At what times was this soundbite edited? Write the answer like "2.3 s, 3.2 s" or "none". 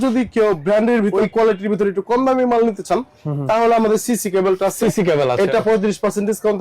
1.1 s